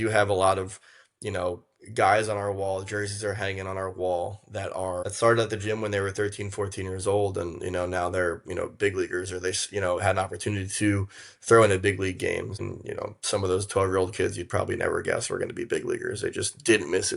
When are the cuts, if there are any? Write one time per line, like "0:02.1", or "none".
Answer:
0:05.1
0:12.6